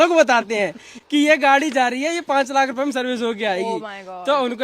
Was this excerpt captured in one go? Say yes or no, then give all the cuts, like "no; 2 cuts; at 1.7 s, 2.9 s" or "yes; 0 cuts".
yes; 0 cuts